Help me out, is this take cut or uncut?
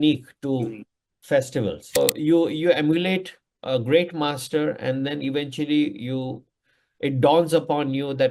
cut